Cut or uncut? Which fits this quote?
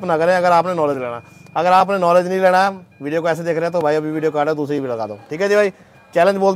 uncut